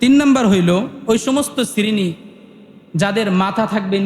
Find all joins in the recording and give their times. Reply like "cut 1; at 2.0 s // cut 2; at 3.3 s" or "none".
cut 1; at 1.0 s